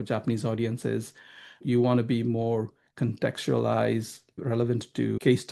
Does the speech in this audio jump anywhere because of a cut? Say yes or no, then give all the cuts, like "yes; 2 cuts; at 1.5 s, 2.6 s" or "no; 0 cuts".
yes; 2 cuts; at 1.6 s, 4.5 s